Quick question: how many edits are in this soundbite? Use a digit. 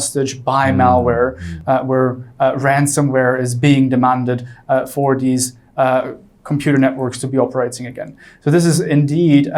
0